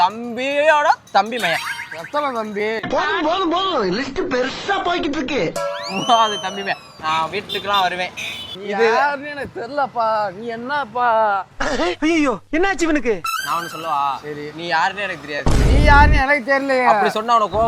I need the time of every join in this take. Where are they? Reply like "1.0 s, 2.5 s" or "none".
8.5 s, 13.3 s